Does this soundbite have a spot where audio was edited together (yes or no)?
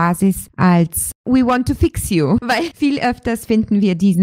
yes